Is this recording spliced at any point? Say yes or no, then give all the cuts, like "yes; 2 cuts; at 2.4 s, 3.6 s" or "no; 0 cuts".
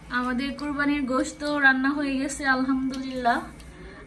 no; 0 cuts